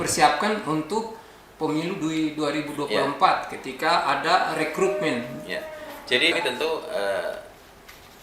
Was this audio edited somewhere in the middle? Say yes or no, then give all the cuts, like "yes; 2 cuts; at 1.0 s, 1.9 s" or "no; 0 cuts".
yes; 1 cut; at 6.3 s